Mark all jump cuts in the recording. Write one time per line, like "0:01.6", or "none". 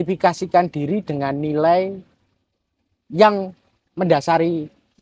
none

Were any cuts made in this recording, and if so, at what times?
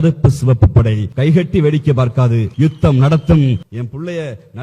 0:01.1
0:02.5
0:03.7

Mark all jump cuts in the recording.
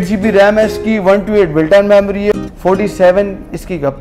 0:02.4

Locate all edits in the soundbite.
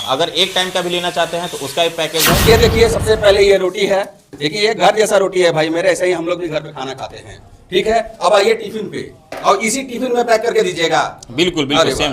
0:02.4

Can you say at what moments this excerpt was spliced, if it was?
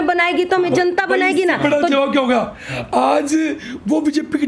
none

